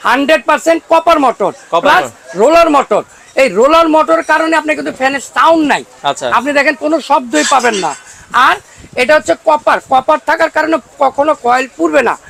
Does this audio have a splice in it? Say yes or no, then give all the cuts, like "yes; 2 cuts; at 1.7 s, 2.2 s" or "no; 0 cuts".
no; 0 cuts